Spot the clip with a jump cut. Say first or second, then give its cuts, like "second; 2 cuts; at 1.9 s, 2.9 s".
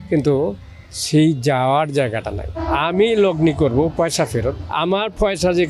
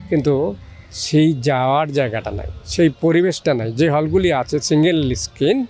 first; 2 cuts; at 2.6 s, 4.6 s